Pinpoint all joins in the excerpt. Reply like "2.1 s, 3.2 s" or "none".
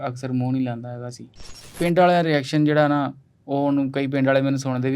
1.6 s